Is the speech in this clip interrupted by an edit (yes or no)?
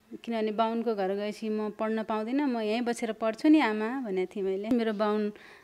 yes